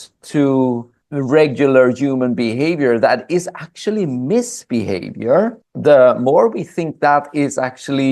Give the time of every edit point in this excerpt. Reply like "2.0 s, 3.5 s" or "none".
1.0 s, 5.7 s